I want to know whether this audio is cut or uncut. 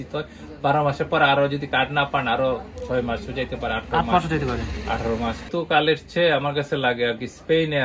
cut